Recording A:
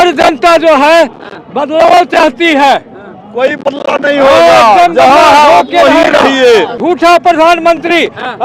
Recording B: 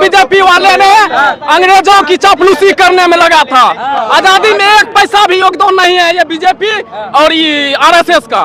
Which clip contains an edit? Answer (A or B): A